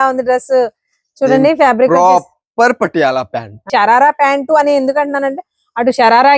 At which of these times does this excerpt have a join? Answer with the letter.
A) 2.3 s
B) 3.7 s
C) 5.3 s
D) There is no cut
B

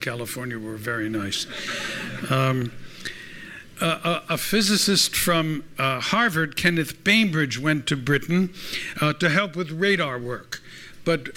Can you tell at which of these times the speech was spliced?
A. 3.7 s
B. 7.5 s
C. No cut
B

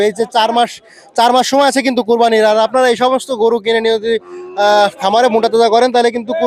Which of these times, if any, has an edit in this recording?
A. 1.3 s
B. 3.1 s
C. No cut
C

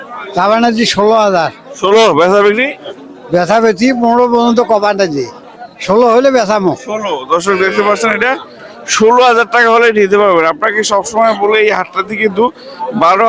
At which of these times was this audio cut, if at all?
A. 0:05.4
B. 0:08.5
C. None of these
A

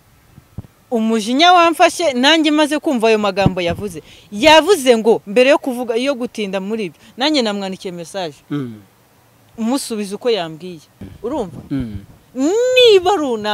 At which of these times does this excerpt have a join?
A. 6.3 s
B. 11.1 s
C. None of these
B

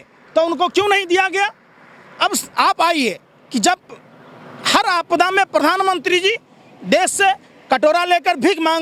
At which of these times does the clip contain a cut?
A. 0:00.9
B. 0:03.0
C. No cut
C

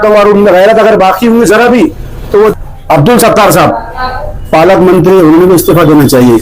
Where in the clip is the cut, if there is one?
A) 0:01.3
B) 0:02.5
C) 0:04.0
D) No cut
B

